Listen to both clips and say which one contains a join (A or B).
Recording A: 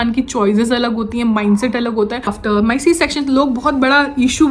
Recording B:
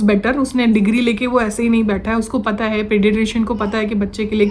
A